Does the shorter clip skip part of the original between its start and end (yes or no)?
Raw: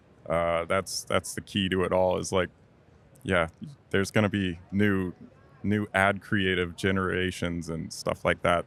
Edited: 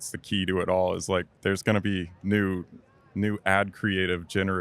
yes